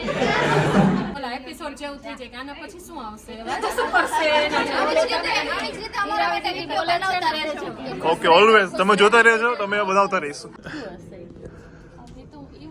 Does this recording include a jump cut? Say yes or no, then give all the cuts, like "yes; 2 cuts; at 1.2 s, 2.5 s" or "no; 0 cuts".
yes; 2 cuts; at 1.1 s, 10.6 s